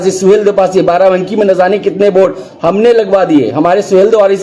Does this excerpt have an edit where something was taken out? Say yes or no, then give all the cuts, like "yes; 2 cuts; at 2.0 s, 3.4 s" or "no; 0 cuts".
no; 0 cuts